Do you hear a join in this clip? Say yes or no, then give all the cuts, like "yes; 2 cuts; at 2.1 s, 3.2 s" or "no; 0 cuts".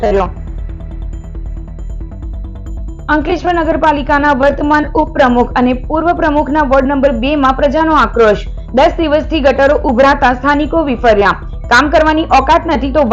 no; 0 cuts